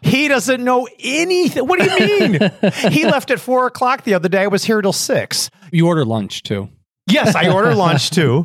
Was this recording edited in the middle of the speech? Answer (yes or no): yes